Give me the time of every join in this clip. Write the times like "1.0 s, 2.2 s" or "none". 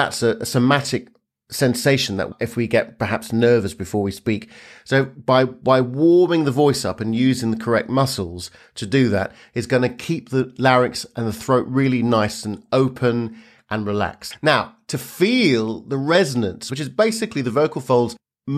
2.3 s, 14.2 s, 16.6 s